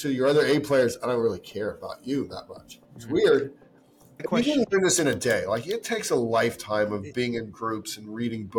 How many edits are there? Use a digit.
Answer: 1